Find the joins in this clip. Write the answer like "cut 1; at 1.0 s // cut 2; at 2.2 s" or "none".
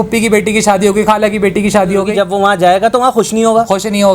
cut 1; at 2.1 s